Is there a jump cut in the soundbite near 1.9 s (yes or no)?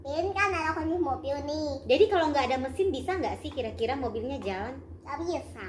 no